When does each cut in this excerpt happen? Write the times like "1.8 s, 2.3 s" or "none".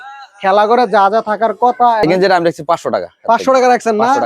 2.0 s